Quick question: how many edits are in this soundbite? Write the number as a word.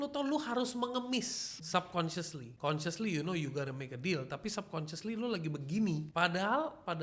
three